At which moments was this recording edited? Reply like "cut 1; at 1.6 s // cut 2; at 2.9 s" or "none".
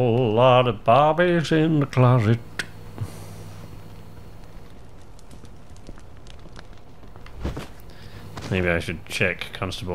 cut 1; at 8.5 s